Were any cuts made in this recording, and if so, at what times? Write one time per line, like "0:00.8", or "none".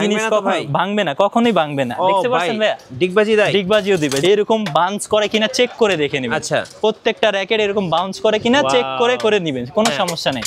0:04.2